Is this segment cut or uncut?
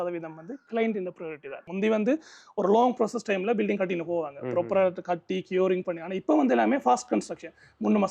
cut